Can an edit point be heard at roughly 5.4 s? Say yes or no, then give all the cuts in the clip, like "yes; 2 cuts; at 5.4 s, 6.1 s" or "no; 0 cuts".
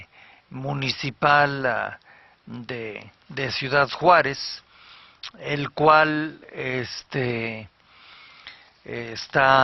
no; 0 cuts